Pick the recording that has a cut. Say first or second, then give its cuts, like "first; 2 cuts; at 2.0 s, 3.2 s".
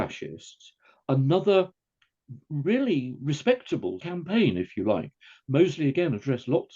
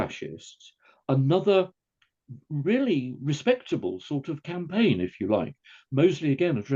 first; 1 cut; at 4.0 s